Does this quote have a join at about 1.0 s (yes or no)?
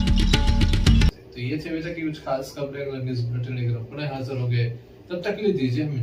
no